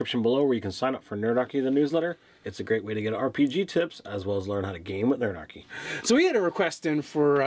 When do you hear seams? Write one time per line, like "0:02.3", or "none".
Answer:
none